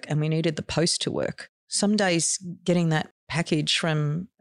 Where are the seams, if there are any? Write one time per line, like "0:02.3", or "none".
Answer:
0:01.6